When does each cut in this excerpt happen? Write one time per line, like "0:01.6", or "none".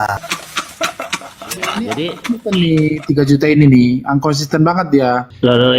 0:01.7

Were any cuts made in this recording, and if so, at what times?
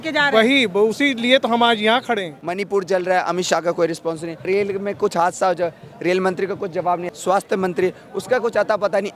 0:02.4
0:04.5
0:07.0

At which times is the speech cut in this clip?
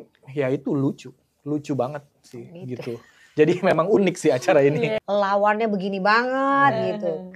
0:05.0

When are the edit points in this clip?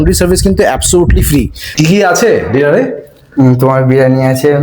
0:01.6

